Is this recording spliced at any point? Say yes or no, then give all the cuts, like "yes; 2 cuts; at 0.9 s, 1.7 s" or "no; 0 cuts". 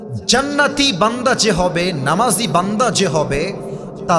no; 0 cuts